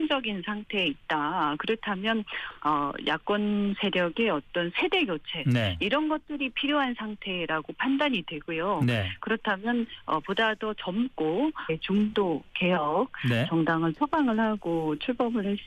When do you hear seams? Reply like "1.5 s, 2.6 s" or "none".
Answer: none